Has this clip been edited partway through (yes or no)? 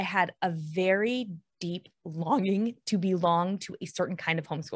no